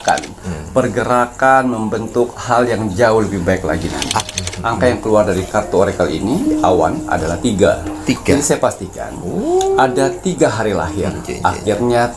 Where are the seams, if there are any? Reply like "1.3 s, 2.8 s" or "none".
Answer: 4.2 s